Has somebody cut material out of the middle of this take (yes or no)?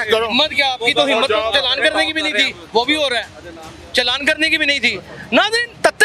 no